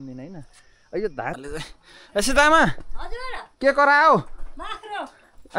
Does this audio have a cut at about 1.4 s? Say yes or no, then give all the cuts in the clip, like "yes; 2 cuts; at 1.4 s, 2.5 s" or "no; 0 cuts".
yes; 1 cut; at 1.4 s